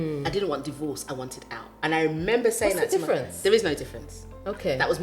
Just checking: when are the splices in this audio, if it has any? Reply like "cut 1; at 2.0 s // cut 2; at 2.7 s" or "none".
none